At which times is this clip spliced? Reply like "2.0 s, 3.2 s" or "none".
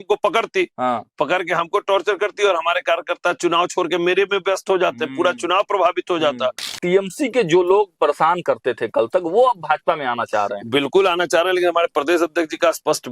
6.7 s